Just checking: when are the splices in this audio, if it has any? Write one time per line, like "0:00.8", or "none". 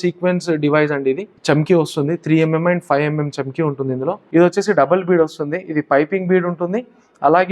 0:01.3
0:04.2